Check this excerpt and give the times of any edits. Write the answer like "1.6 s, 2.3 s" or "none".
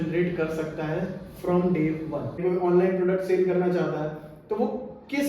2.4 s